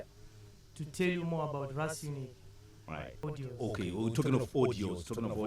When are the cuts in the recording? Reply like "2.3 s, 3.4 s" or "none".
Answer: 3.2 s